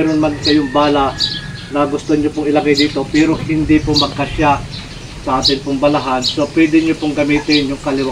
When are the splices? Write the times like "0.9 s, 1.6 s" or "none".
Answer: none